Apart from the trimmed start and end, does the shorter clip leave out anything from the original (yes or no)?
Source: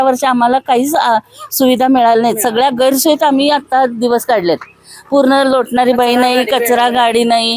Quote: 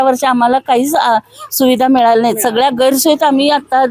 no